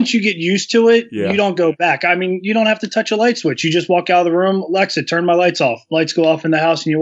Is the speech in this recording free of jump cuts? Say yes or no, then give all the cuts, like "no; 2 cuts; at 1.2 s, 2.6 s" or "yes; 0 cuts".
yes; 0 cuts